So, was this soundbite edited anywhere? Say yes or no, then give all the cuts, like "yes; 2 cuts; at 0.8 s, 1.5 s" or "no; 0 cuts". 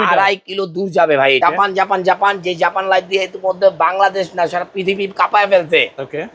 yes; 1 cut; at 1.4 s